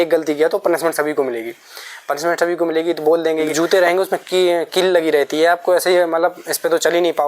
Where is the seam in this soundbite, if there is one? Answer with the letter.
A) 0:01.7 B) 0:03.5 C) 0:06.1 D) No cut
B